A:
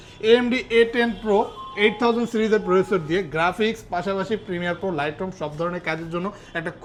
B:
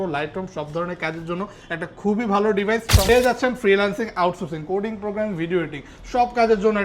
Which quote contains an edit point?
B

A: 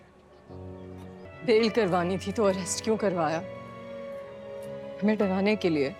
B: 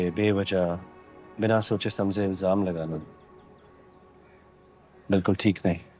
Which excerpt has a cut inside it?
A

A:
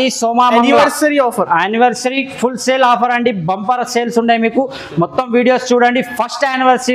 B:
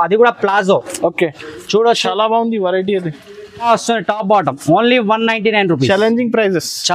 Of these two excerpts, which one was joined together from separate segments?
B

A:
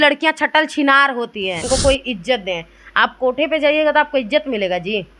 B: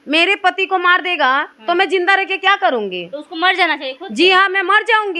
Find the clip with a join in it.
A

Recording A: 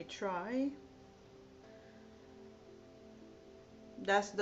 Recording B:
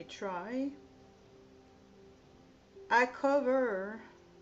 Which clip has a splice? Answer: B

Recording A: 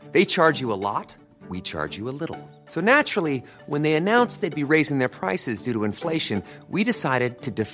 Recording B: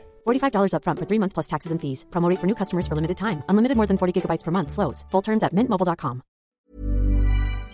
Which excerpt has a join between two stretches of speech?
B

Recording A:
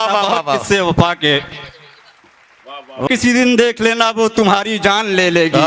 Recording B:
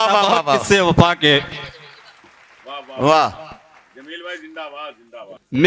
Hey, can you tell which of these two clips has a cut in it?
A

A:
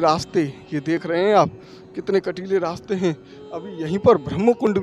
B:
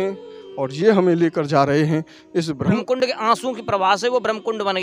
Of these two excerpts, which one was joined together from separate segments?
B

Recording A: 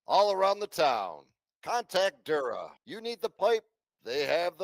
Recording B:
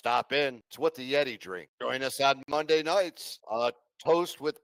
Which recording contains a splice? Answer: A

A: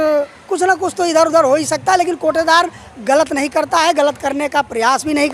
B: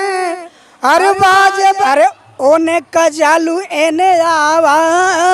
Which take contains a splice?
B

